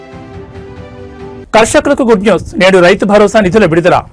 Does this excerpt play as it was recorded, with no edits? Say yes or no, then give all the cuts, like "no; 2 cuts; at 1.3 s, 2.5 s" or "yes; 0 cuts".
no; 1 cut; at 1.4 s